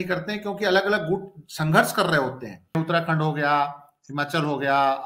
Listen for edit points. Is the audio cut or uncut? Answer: cut